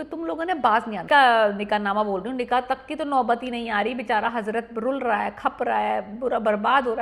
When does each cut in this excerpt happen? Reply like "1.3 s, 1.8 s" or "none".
1.0 s